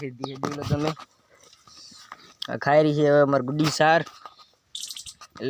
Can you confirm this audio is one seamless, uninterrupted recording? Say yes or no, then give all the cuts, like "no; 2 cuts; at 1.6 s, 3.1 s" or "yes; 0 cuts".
yes; 0 cuts